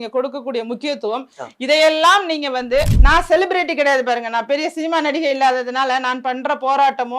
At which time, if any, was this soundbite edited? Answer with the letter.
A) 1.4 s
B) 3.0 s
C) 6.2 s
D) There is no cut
B